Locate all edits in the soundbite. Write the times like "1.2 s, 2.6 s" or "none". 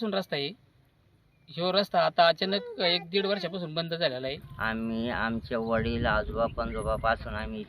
4.5 s